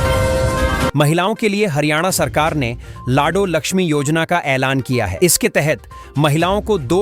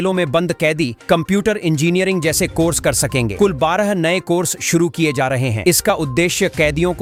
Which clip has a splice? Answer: first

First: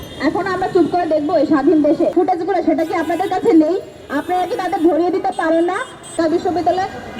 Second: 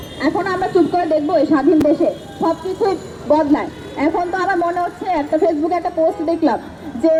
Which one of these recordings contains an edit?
first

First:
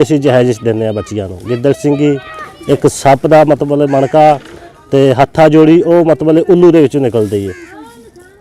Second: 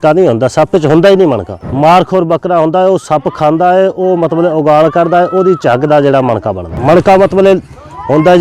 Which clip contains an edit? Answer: second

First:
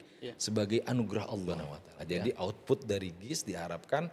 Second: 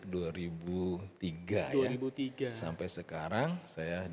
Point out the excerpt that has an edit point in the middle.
first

